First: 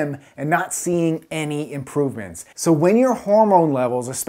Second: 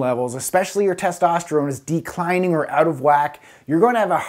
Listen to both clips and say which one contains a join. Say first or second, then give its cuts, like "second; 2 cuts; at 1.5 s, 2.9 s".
first; 1 cut; at 2.5 s